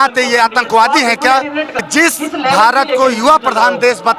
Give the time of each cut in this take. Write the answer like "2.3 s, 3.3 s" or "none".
1.8 s